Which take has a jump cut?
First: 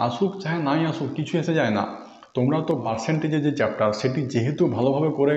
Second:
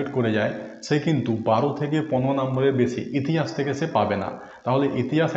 first; 1 cut; at 2.9 s

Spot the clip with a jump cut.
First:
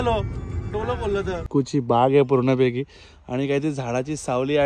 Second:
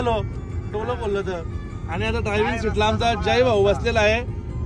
first; 1 cut; at 1.4 s

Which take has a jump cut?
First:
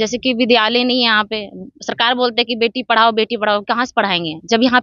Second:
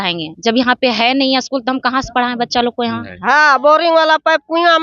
second; 1 cut; at 3.1 s

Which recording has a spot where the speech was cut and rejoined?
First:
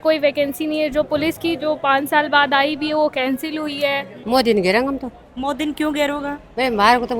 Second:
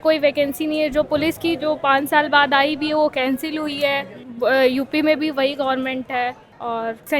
first; 1 cut; at 4.1 s

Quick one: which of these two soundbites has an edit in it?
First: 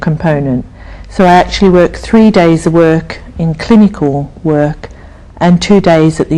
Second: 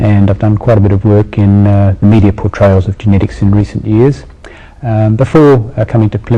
first; 1 cut; at 3.2 s

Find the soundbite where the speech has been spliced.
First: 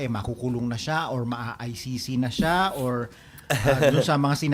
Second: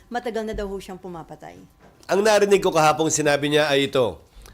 second; 1 cut; at 1.9 s

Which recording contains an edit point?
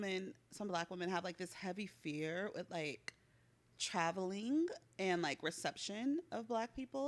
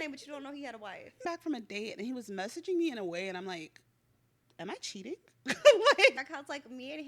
second; 2 cuts; at 1.3 s, 6.2 s

